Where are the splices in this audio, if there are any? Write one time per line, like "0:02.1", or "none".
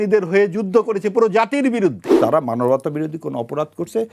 0:02.1